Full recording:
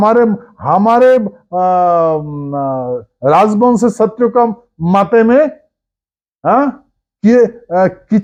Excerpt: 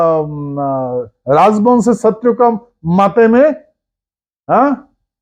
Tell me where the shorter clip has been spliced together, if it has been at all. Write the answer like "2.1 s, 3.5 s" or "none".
none